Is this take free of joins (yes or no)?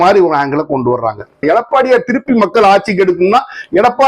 no